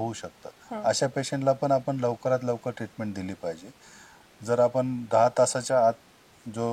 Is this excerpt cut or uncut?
uncut